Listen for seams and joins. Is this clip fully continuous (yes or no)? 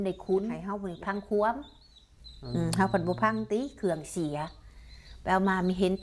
no